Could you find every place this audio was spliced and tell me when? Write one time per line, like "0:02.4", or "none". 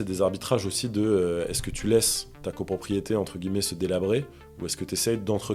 none